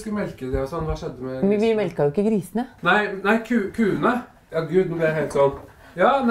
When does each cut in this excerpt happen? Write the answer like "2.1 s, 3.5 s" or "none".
2.7 s, 4.4 s